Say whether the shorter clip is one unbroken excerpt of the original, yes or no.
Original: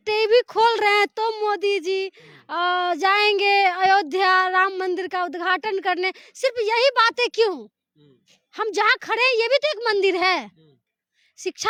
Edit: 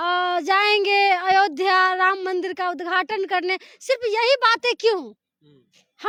yes